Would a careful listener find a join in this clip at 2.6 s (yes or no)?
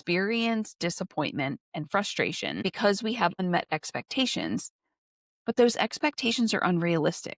yes